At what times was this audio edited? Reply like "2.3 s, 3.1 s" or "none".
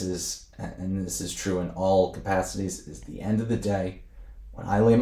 none